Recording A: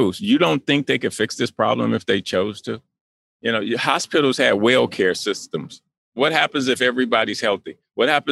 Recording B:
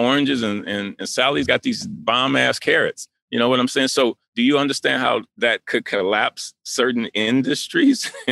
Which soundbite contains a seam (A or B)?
A